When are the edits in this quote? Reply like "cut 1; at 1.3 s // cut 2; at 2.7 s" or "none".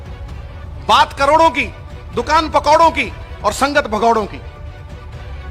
cut 1; at 0.8 s // cut 2; at 4.4 s